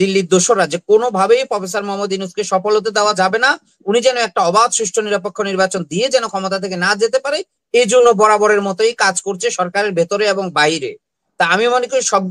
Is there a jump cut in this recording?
no; 0 cuts

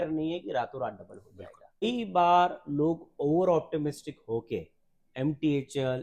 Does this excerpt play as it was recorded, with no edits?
no; 1 cut; at 1.8 s

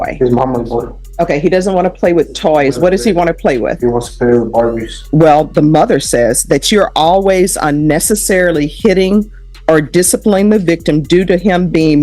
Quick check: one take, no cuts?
no; 2 cuts; at 1.0 s, 4.9 s

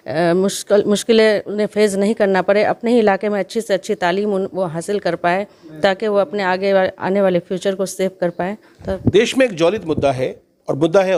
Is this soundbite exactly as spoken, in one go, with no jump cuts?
yes; 0 cuts

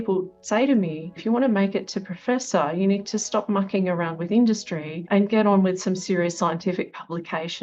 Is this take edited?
yes; 1 cut; at 1.1 s

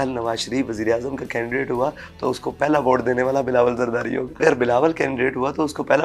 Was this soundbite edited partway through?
yes; 1 cut; at 4.4 s

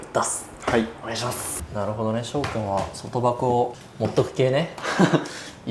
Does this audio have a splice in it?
no; 0 cuts

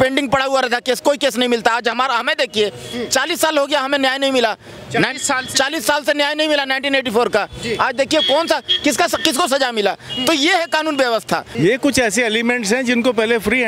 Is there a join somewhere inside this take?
yes; 1 cut; at 11.5 s

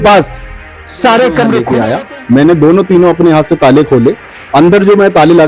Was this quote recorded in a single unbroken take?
no; 1 cut; at 1.7 s

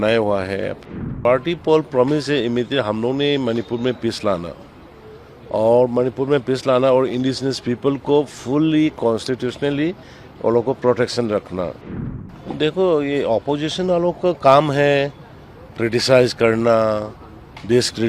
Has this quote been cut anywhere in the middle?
yes; 2 cuts; at 1.1 s, 11.8 s

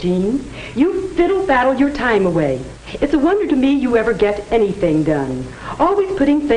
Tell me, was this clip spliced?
yes; 1 cut; at 2.0 s

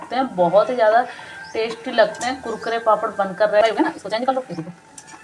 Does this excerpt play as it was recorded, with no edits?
yes; 0 cuts

